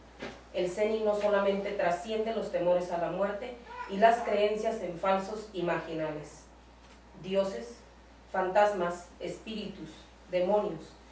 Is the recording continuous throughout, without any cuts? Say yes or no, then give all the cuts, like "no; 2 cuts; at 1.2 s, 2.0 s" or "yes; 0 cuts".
no; 1 cut; at 1.1 s